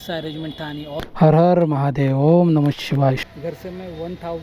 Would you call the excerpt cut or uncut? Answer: cut